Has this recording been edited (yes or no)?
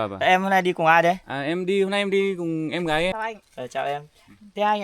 yes